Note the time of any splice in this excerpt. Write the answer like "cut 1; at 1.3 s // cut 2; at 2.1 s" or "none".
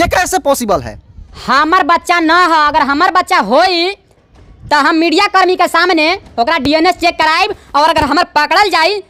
none